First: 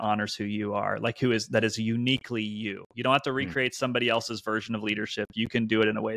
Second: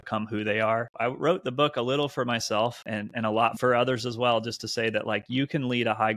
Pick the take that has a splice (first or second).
second